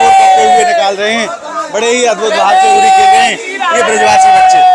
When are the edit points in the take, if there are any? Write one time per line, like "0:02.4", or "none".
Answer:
none